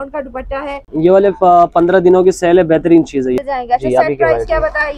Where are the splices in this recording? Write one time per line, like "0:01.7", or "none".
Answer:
0:00.8
0:03.4